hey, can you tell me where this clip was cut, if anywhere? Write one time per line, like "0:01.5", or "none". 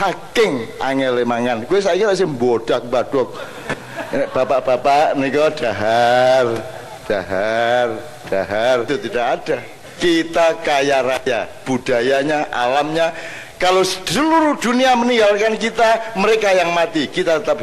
0:08.9